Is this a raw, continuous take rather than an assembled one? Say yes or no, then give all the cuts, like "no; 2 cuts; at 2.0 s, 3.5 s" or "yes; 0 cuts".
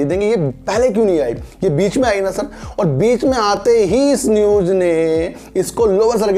yes; 0 cuts